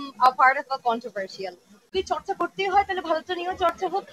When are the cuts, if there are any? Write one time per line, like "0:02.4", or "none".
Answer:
0:01.8